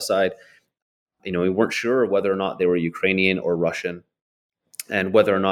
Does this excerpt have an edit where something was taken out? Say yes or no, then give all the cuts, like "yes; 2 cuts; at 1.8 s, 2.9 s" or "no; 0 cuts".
no; 0 cuts